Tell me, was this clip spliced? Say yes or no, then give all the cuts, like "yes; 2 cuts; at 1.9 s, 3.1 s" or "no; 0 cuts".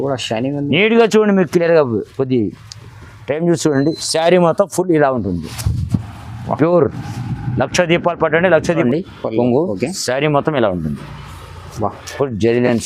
yes; 1 cut; at 8.8 s